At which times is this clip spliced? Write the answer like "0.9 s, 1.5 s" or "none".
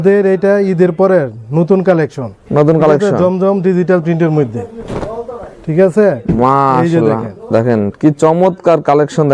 none